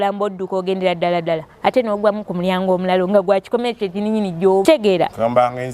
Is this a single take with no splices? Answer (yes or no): no